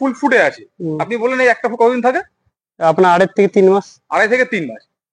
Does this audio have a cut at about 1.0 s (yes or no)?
no